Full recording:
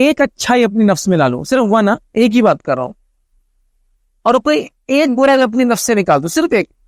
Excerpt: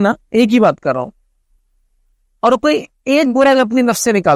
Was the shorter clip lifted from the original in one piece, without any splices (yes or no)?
yes